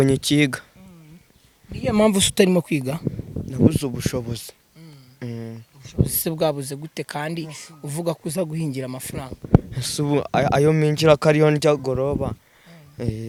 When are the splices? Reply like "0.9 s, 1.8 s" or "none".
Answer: none